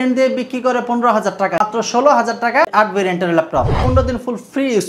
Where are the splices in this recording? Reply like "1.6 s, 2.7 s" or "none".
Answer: 1.6 s, 2.7 s, 3.8 s